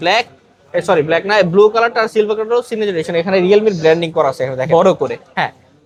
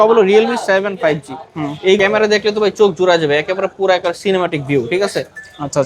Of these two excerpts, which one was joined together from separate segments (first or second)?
second